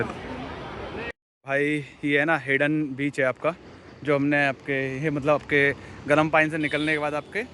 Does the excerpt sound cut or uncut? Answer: cut